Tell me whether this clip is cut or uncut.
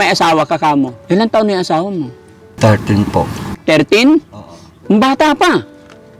cut